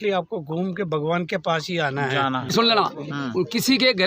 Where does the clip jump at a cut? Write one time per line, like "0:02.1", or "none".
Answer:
0:02.5